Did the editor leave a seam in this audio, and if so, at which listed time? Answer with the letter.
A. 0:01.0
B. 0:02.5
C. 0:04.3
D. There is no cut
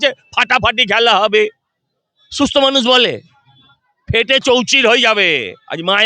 D